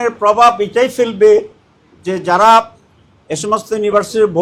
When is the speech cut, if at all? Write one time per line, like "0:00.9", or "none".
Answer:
none

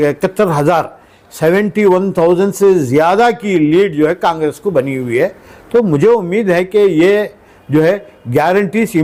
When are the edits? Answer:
none

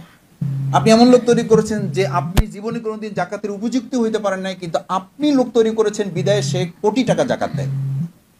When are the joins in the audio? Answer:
none

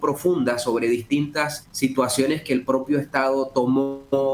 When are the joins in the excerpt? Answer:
0:01.6

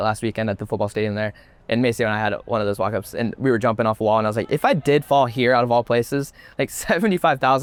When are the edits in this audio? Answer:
none

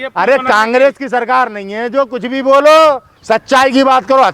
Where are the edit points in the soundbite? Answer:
0:03.1

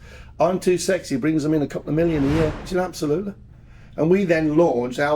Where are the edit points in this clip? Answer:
0:02.6

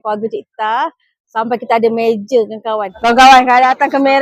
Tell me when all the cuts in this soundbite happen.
0:02.9

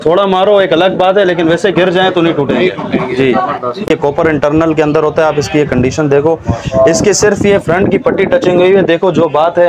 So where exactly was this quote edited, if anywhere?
0:03.9

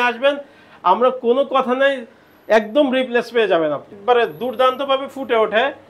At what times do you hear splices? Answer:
0:03.9

